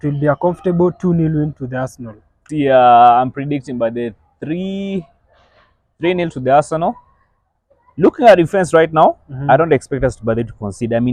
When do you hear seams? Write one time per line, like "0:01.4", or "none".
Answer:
0:02.4